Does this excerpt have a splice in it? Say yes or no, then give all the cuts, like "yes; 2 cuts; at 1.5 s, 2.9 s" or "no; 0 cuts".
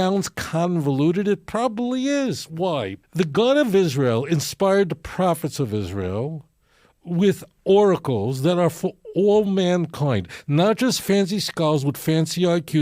yes; 1 cut; at 3.0 s